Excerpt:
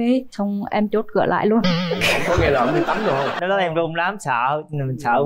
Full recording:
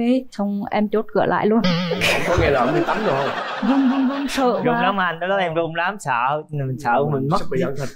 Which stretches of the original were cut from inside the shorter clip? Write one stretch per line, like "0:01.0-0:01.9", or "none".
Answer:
0:03.4-0:05.2